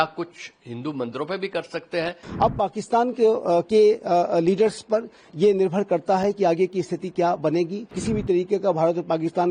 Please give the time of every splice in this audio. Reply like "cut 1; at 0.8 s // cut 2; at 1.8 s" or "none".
cut 1; at 2.2 s // cut 2; at 7.9 s